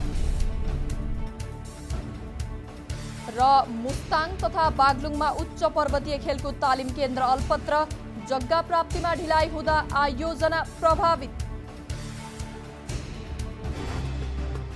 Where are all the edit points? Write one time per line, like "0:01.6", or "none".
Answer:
none